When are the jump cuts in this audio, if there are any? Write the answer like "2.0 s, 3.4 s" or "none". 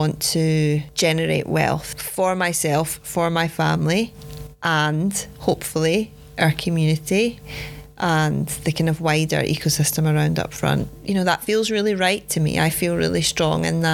none

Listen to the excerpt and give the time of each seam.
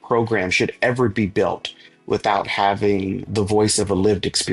3.3 s

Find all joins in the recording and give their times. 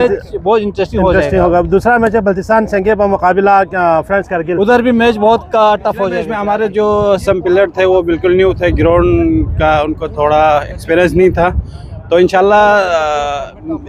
6.3 s

